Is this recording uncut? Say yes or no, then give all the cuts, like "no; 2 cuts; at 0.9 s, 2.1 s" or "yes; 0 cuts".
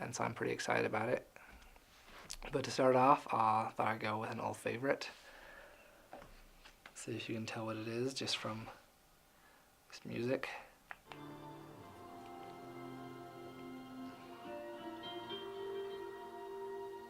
no; 1 cut; at 8.3 s